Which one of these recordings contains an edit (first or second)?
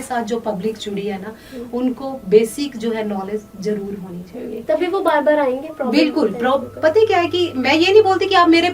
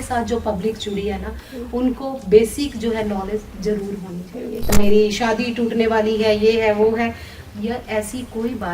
second